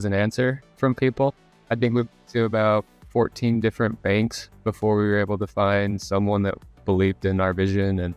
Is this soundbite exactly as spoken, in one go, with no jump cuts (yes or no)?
no